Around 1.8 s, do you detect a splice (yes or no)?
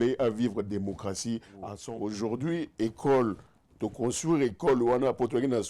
yes